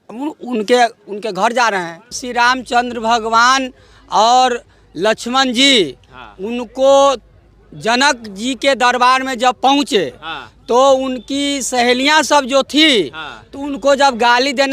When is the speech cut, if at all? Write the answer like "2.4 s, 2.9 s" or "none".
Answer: 2.2 s